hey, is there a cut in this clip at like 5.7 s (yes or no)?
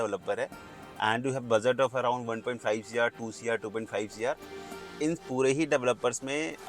no